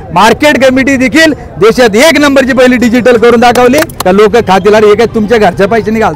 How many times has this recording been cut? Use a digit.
1